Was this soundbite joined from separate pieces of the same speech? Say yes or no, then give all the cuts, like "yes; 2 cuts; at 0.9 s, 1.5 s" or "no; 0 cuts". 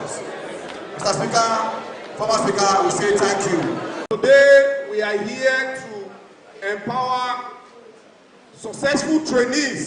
yes; 1 cut; at 3.9 s